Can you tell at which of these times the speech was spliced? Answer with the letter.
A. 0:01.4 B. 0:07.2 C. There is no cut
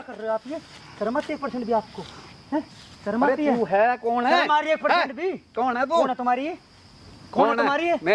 C